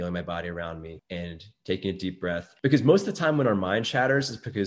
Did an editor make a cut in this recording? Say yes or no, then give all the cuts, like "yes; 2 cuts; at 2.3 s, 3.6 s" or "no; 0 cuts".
yes; 2 cuts; at 0.9 s, 2.5 s